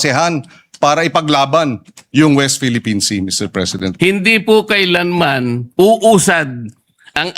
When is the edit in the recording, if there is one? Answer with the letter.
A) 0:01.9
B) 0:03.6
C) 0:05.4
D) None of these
B